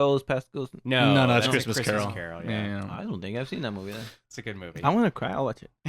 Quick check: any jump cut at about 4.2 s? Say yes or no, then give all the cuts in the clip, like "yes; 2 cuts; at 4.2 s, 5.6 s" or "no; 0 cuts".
yes; 1 cut; at 4.2 s